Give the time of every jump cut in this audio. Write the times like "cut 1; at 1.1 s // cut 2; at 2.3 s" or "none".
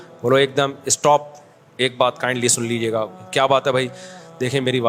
none